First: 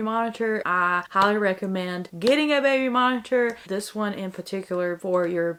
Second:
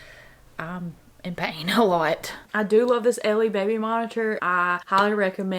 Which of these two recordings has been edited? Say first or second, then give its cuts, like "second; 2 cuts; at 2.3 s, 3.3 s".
second; 1 cut; at 2.4 s